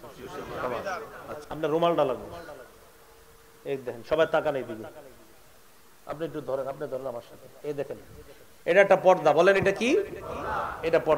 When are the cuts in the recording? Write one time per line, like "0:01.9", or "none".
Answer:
0:01.4